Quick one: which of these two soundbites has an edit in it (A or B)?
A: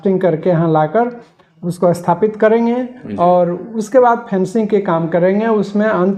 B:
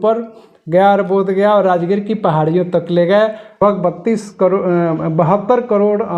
B